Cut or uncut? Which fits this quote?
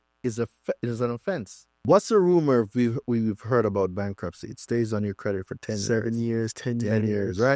cut